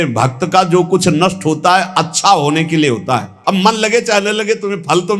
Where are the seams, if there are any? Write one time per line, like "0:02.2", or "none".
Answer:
0:03.3